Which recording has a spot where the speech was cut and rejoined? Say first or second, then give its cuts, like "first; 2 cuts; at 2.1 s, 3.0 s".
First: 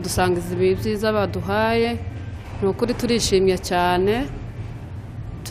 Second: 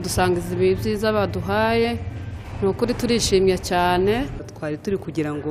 second; 1 cut; at 4.5 s